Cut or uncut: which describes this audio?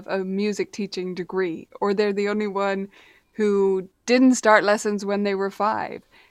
uncut